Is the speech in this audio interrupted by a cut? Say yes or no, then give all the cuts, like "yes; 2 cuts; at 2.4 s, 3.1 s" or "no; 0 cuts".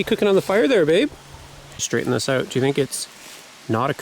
yes; 1 cut; at 1.8 s